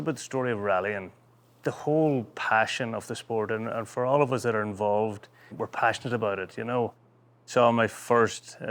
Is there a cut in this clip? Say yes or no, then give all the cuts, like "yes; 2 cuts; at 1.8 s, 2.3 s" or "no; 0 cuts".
yes; 2 cuts; at 5.5 s, 7.4 s